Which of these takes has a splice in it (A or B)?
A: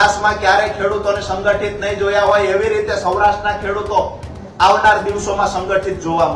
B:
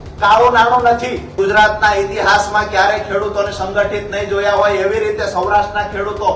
B